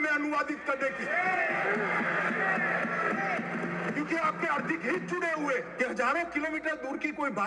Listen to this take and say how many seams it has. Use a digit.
1